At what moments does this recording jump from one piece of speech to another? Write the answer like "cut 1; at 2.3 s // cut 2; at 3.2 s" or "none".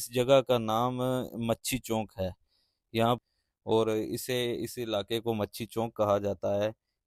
cut 1; at 3.2 s